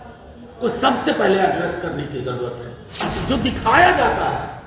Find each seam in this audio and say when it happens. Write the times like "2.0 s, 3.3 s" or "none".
3.0 s